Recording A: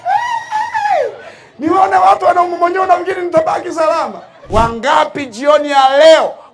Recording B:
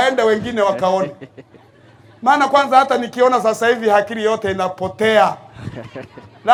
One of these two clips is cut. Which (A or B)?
A